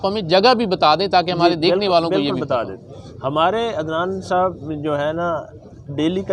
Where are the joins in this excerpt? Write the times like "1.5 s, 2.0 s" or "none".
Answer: none